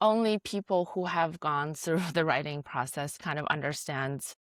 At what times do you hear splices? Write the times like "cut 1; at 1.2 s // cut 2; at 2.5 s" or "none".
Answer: none